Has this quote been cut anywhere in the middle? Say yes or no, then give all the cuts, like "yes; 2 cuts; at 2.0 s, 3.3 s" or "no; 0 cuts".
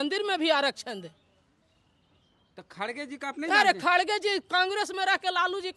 no; 0 cuts